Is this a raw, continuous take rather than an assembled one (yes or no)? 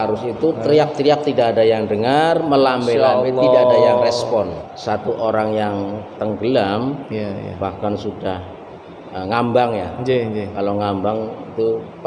no